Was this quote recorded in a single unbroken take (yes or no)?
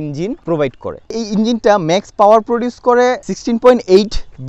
yes